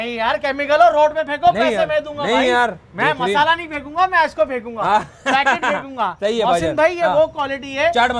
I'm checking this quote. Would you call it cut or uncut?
uncut